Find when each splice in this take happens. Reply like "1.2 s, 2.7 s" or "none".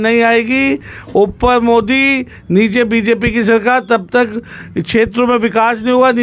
none